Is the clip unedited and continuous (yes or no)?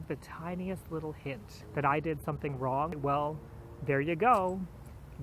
no